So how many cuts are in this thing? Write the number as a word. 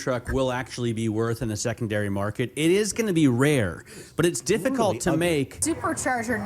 one